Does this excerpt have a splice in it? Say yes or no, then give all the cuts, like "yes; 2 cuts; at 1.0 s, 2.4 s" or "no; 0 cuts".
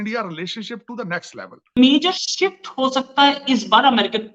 yes; 1 cut; at 1.8 s